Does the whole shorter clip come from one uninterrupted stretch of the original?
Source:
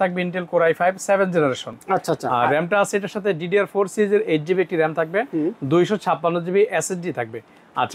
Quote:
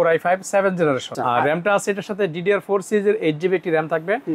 no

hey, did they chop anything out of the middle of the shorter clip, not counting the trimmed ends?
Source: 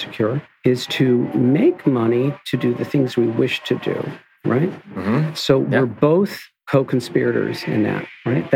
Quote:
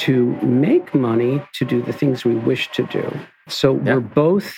yes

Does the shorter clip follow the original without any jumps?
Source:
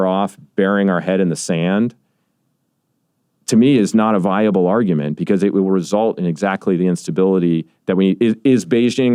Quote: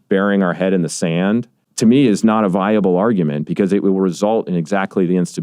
no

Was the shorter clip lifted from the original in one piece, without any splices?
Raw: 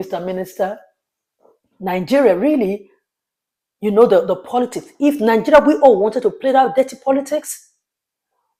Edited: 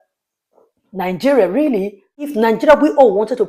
no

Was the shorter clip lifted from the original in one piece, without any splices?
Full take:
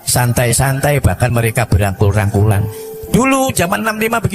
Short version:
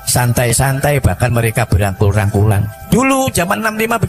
no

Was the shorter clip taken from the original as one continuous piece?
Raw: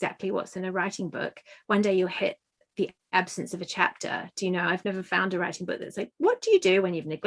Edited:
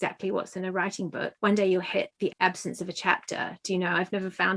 no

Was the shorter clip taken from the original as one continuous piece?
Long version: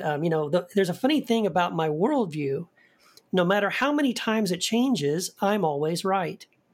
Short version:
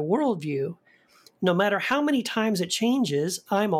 yes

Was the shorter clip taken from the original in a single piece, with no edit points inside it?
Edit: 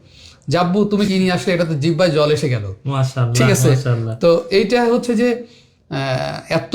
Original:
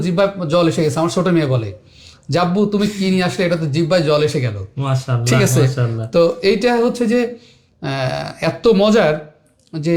no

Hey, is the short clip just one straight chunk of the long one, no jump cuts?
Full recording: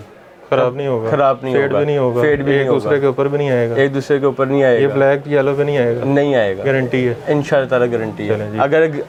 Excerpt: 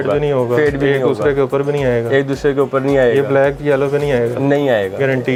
yes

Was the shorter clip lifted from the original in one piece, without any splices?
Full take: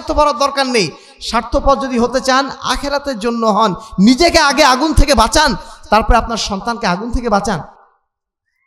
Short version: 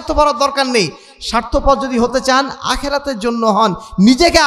yes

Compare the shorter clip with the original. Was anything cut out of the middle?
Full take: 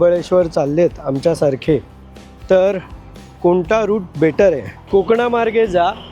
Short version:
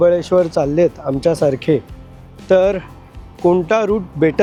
no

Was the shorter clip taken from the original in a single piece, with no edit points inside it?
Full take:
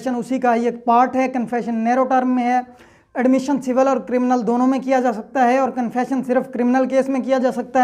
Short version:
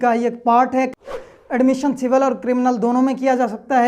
no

